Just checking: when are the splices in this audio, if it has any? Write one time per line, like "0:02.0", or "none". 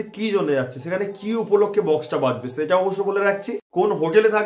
0:03.6

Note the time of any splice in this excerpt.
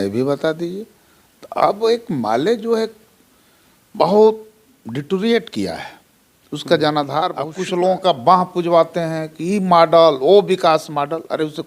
0:07.6

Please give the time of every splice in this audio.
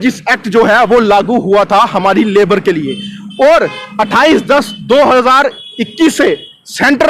none

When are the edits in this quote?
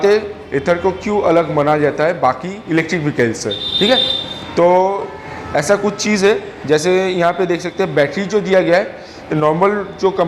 0:02.5

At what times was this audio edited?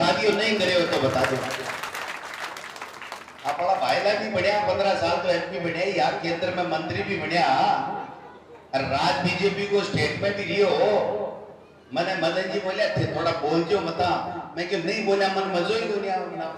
0:01.9

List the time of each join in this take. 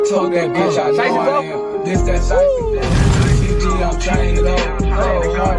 none

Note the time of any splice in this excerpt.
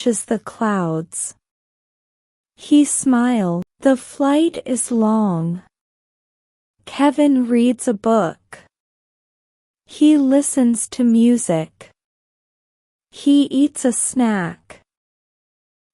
0:03.7

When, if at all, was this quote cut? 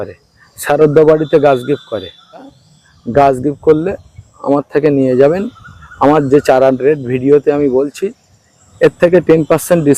0:02.6

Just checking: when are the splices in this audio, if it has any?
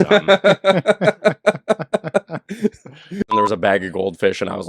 0:03.3

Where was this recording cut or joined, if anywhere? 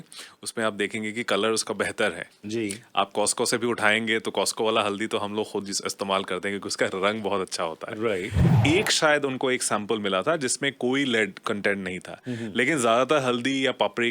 0:08.6

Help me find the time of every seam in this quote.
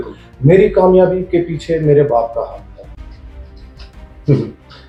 none

